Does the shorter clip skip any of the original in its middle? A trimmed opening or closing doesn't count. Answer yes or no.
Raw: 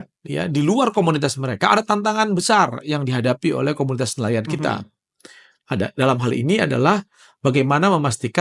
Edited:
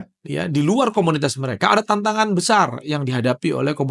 no